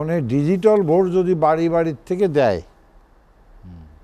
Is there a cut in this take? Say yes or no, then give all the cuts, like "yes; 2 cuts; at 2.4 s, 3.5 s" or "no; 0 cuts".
no; 0 cuts